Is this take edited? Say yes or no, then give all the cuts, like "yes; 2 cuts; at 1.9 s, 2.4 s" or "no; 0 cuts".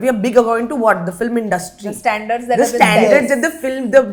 no; 0 cuts